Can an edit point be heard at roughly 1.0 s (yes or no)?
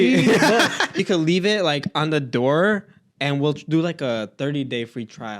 yes